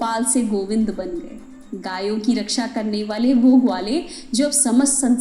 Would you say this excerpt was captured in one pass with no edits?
yes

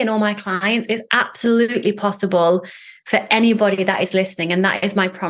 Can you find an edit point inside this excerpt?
no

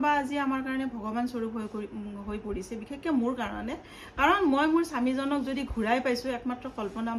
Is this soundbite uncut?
yes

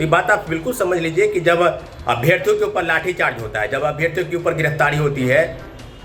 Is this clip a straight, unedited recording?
yes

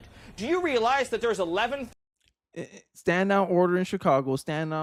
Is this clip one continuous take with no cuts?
yes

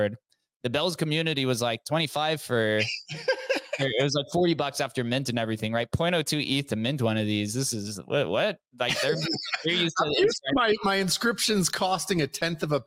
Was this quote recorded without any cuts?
yes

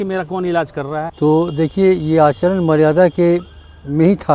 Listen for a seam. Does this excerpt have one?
yes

